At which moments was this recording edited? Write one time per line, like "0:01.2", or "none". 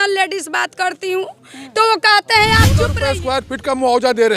0:03.0

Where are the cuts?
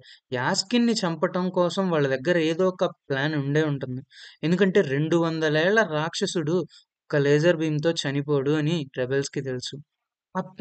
none

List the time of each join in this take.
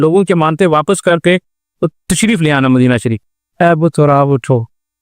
0:03.2

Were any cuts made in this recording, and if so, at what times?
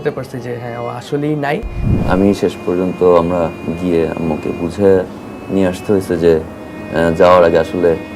0:01.9

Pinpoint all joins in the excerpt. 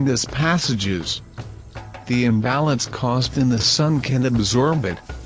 0:03.8

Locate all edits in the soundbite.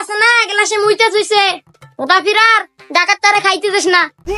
none

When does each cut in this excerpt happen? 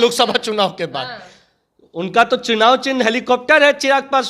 none

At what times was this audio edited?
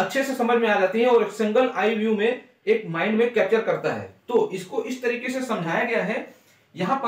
none

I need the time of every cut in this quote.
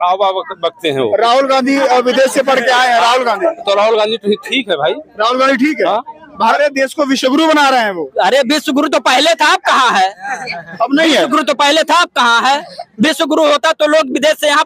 0:06.5

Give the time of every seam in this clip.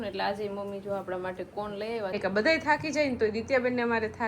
0:02.1

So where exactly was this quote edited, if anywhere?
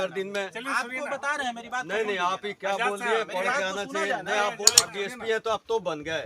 0:04.8

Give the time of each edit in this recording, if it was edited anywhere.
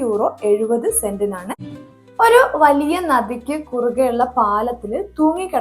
0:01.7

